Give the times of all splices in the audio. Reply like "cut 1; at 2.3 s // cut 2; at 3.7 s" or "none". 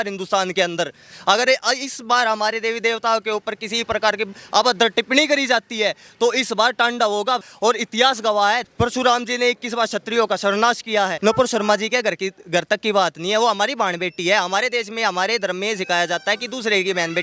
cut 1; at 7.4 s // cut 2; at 11.1 s